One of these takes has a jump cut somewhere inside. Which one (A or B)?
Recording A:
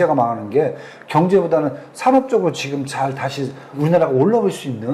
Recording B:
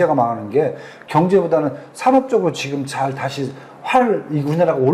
A